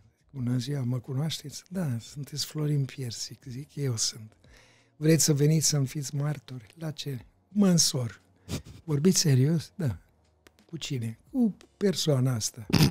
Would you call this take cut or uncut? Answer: uncut